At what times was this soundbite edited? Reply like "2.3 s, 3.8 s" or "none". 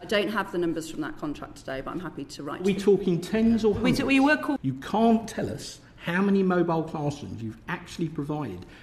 4.6 s